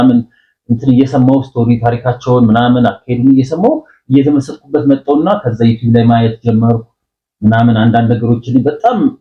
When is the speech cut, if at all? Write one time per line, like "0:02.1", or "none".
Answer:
none